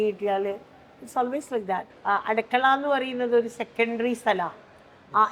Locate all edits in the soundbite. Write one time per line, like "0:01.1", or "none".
0:01.9